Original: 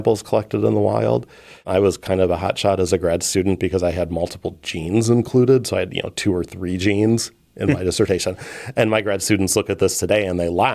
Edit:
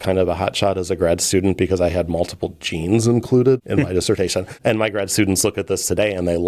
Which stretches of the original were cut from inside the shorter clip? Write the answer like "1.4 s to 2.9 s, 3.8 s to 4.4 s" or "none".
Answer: 5.7 s to 7.5 s, 8.4 s to 8.6 s